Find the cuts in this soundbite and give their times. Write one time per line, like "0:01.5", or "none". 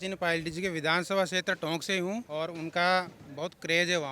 0:02.3